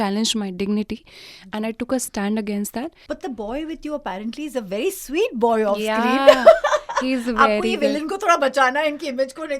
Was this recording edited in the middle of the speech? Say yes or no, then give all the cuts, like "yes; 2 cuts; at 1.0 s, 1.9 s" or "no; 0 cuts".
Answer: yes; 1 cut; at 3.0 s